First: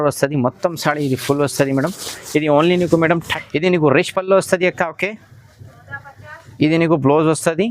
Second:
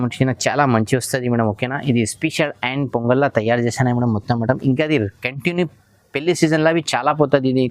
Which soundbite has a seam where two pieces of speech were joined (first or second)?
first